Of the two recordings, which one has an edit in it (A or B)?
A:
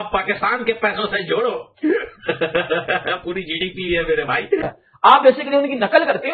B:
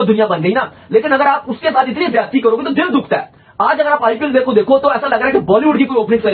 A